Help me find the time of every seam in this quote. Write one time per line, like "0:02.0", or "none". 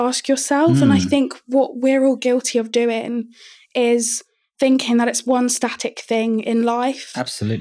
none

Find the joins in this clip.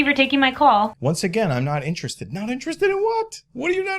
0:01.0

